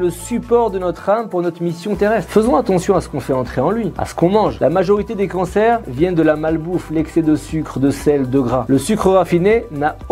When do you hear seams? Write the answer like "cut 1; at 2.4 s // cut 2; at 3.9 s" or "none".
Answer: none